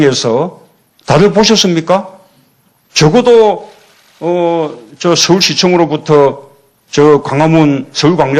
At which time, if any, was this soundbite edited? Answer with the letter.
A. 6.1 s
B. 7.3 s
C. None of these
B